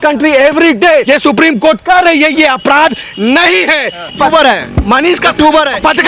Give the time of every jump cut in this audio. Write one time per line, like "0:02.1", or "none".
0:01.0
0:04.2